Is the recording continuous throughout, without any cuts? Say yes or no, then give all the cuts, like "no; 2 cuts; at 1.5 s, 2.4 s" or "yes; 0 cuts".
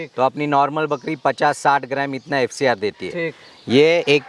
yes; 0 cuts